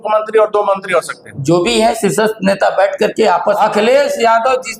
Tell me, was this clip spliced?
yes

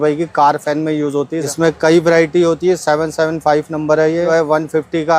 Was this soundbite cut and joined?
yes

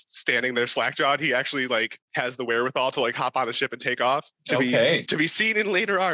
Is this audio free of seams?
no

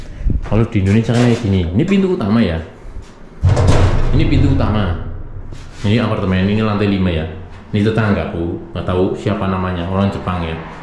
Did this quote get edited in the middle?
no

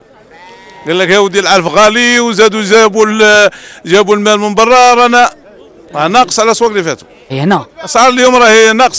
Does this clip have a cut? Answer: yes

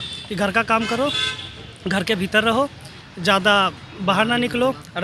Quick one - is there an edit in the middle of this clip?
no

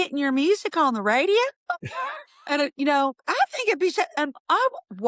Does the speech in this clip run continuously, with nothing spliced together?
yes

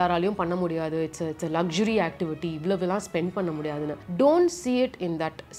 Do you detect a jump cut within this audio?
no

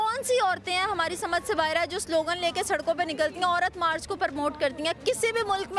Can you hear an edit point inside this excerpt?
no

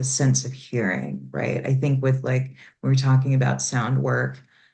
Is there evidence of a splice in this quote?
no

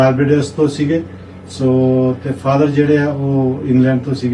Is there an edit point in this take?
no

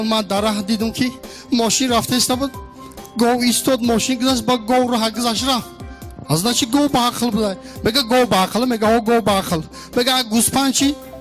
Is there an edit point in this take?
no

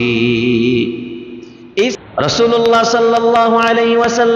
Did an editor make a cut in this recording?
yes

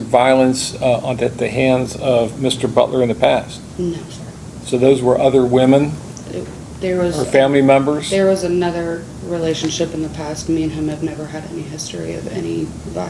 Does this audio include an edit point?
no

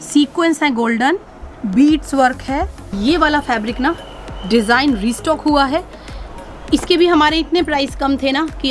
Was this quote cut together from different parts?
yes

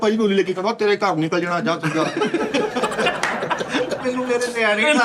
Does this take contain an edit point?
yes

